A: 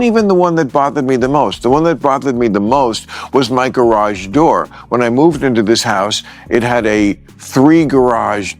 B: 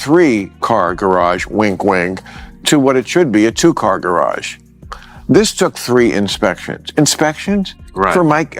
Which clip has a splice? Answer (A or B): A